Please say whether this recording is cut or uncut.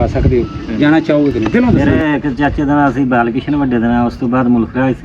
cut